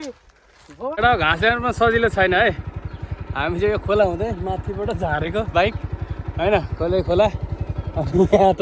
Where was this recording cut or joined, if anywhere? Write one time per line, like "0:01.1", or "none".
0:00.9